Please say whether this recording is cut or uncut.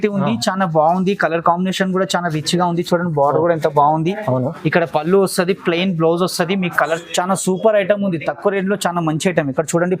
cut